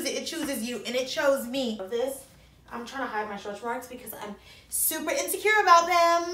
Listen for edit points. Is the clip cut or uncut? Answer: cut